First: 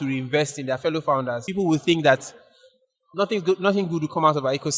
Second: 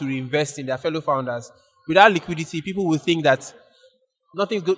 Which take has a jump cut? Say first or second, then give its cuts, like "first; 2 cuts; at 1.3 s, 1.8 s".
first; 1 cut; at 1.4 s